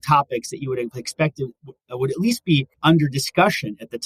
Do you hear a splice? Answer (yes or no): no